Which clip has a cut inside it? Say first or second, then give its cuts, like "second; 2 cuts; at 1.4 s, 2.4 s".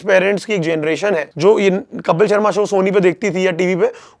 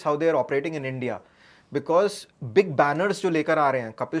first; 1 cut; at 1.3 s